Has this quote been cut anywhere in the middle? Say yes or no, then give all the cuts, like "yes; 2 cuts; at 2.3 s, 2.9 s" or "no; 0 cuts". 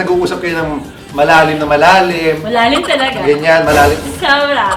no; 0 cuts